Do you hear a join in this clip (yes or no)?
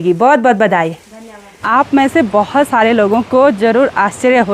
yes